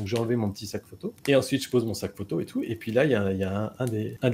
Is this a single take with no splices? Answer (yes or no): no